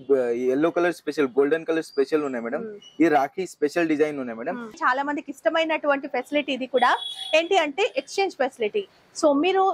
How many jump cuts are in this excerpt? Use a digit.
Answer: 1